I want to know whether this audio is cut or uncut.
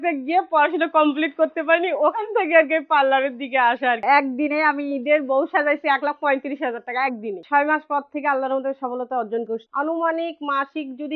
cut